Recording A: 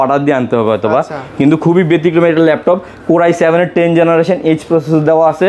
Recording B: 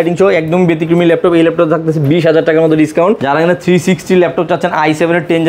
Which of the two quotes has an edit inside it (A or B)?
B